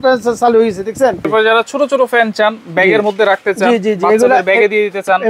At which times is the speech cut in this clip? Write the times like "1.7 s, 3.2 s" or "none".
1.3 s